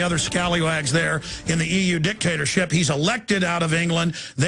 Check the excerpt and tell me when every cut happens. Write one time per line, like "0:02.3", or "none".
0:01.4